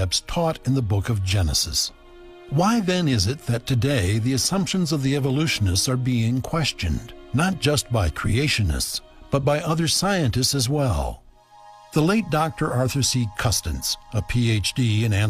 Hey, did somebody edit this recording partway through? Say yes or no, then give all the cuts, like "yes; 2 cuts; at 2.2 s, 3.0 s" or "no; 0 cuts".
no; 0 cuts